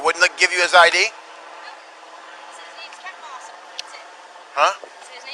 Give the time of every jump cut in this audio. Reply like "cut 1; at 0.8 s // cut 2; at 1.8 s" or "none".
none

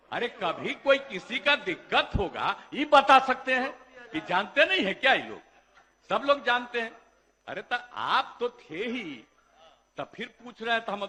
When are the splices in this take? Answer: none

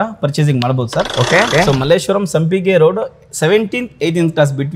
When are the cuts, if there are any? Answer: cut 1; at 1.5 s

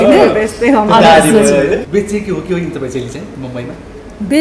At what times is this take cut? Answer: cut 1; at 1.9 s

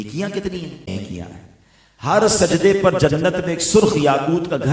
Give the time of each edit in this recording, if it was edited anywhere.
cut 1; at 0.9 s

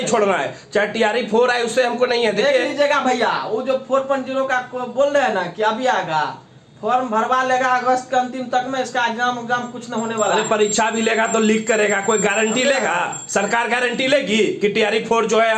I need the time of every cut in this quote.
none

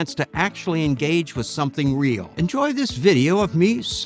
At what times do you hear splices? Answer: cut 1; at 2.3 s

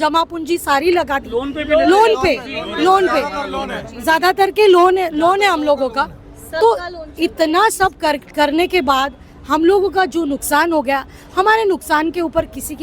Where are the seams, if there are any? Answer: none

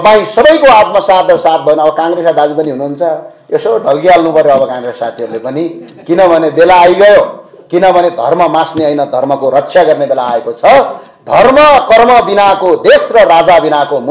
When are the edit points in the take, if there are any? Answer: none

